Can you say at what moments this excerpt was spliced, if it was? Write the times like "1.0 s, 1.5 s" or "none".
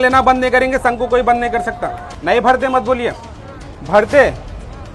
2.1 s